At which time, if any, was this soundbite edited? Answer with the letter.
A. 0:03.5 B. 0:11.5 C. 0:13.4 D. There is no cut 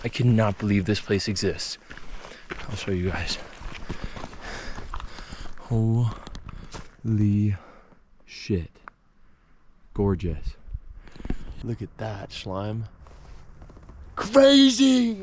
B